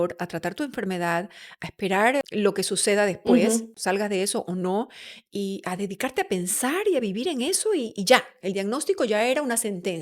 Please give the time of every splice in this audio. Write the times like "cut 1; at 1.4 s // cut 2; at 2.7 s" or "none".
cut 1; at 2.2 s // cut 2; at 3.8 s